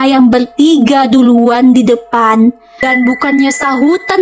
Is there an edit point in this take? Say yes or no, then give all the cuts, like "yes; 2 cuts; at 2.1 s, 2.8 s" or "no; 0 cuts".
yes; 1 cut; at 2.8 s